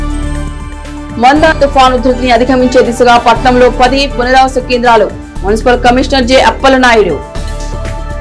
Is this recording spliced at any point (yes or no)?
no